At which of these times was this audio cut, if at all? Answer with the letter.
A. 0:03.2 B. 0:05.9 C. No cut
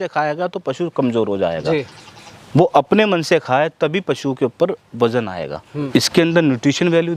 B